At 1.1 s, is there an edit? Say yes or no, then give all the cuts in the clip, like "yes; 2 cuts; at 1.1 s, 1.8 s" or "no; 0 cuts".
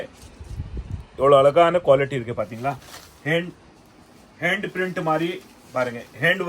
no; 0 cuts